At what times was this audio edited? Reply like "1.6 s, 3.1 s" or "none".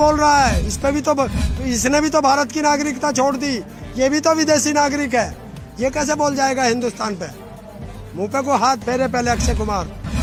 none